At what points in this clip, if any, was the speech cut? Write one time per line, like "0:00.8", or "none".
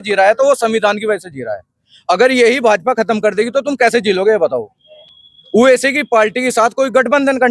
none